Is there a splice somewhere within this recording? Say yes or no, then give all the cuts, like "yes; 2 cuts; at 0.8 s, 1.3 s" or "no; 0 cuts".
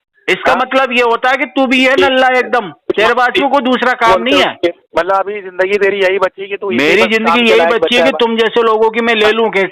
yes; 1 cut; at 4.8 s